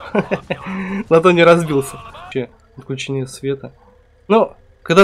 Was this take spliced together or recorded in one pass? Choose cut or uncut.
cut